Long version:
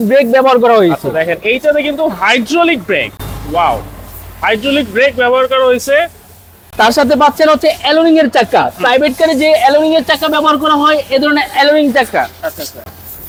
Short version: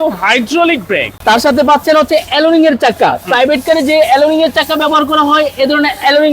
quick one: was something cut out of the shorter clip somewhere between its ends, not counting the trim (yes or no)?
yes